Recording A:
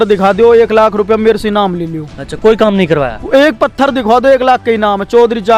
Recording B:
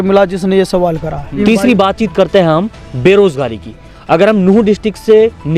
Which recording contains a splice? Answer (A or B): B